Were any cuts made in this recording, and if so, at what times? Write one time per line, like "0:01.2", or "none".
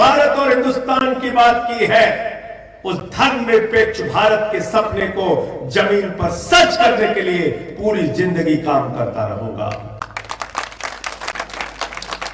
0:11.3